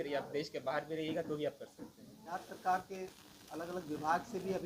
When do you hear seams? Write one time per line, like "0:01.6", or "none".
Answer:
0:02.2